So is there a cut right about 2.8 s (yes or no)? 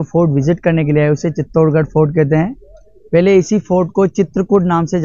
no